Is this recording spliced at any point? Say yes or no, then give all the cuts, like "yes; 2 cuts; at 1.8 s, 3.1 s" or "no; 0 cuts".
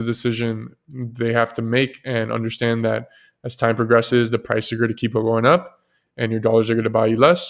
no; 0 cuts